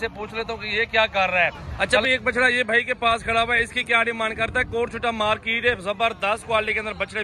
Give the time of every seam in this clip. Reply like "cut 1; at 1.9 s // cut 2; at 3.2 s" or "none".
cut 1; at 1.6 s